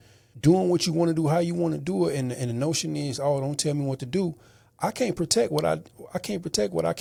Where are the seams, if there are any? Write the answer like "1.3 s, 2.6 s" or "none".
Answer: none